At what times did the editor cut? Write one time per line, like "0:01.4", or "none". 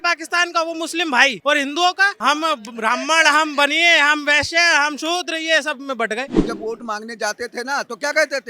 0:01.4
0:02.1
0:06.4